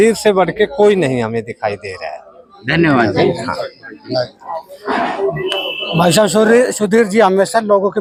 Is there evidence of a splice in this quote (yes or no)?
no